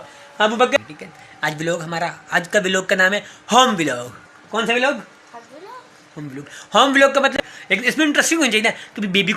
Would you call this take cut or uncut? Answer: cut